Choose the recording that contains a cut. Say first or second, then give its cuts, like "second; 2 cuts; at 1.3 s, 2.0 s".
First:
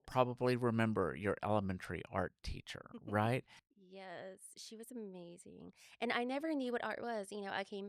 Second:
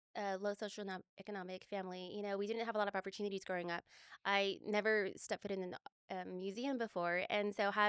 first; 1 cut; at 3.6 s